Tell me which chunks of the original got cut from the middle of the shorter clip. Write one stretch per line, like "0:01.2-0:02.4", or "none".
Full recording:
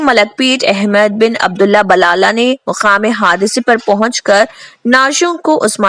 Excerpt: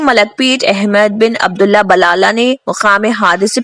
none